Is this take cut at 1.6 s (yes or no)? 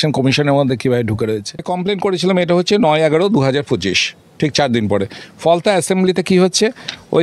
yes